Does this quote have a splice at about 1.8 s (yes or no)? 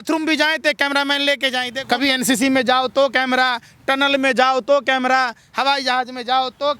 yes